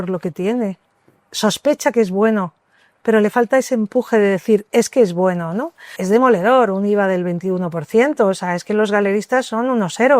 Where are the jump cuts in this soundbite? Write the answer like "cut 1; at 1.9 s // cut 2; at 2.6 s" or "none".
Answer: cut 1; at 6.0 s